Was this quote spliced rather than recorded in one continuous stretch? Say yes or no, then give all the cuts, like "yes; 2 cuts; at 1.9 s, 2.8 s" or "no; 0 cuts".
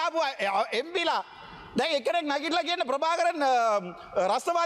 no; 0 cuts